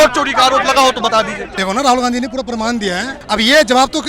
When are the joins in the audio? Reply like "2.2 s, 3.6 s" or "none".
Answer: 1.4 s, 3.1 s